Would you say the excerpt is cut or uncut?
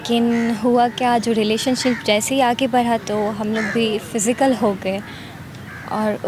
uncut